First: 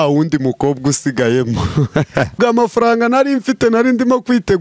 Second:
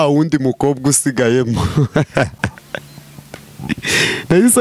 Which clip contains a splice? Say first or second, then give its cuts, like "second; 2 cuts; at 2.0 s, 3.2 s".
first; 1 cut; at 2.4 s